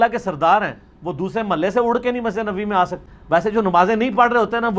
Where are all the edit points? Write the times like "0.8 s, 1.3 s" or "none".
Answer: 3.1 s

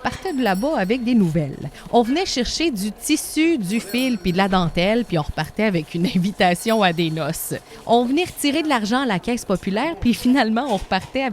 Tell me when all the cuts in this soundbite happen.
1.8 s

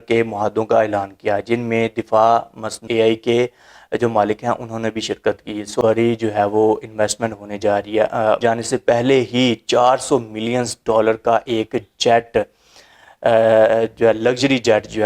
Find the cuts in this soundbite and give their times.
2.8 s, 5.8 s, 8.4 s

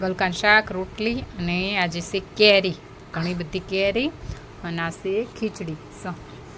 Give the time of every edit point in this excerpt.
none

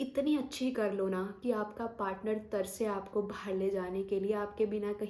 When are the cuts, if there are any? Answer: none

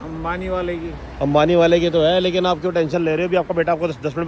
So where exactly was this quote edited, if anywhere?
none

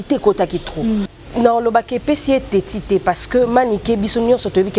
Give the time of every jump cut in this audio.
1.1 s

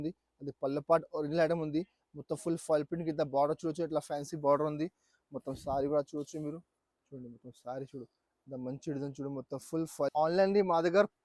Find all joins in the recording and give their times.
10.1 s

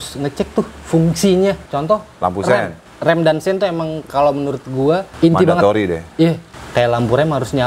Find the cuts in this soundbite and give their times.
2.8 s, 5.1 s, 6.5 s

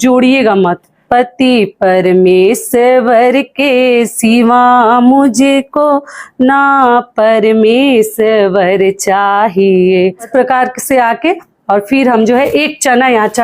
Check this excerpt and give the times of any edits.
10.2 s

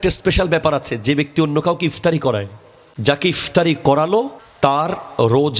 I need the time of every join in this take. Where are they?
2.2 s, 4.4 s

